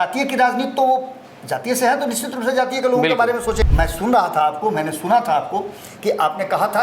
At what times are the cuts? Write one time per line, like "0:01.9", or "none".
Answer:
0:03.7